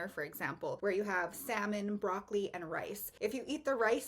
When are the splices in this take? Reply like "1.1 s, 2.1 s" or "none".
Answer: 0.8 s, 3.0 s

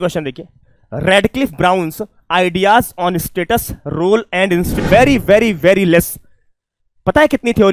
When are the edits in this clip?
4.8 s

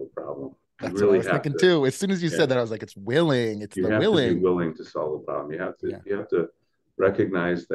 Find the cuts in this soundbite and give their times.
none

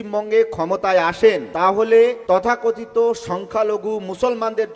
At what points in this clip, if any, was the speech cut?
1.5 s, 2.2 s

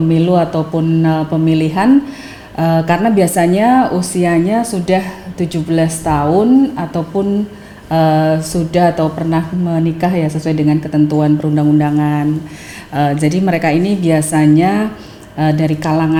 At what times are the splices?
none

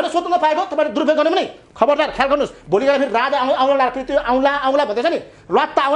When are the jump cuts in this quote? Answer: none

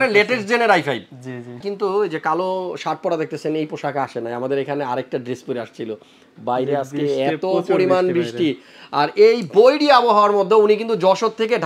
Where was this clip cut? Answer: 1.7 s

